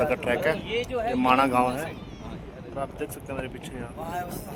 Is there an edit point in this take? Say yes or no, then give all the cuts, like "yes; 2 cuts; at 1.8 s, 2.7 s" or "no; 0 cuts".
no; 0 cuts